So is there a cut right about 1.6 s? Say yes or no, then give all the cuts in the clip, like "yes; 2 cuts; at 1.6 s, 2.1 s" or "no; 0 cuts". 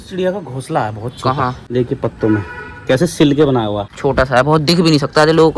yes; 2 cuts; at 1.6 s, 3.9 s